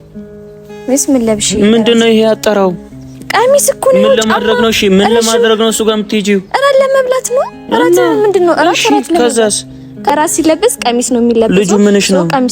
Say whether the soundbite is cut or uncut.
cut